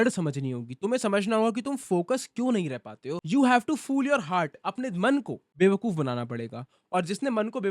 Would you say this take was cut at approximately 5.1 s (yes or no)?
no